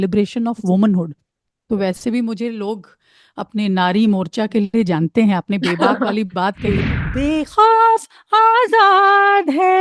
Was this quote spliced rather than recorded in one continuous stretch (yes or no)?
yes